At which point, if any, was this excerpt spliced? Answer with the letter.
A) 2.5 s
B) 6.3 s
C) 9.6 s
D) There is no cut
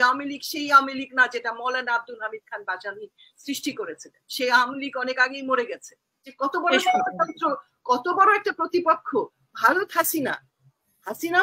B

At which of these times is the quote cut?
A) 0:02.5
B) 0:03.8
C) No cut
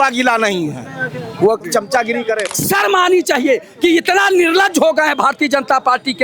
A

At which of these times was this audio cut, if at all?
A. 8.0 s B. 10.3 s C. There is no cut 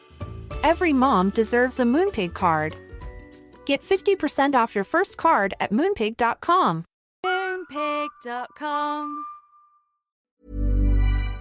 B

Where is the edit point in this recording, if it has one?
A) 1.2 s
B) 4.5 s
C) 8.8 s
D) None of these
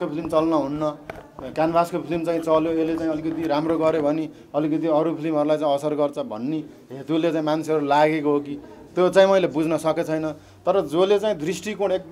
D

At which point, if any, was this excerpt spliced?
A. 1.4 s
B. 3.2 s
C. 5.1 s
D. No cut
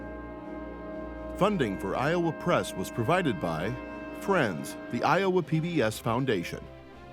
A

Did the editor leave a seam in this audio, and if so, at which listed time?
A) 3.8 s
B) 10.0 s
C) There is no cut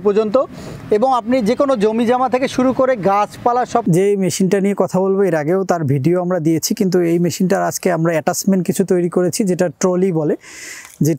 A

